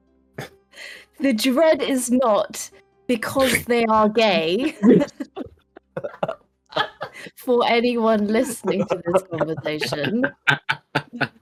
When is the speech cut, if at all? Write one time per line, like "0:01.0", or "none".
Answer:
none